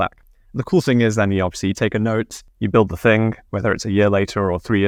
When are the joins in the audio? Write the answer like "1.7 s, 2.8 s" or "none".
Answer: none